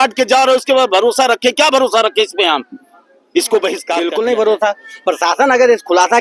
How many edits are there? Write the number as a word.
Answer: one